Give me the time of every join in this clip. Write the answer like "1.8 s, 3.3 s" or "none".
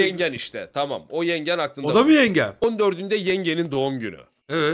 2.6 s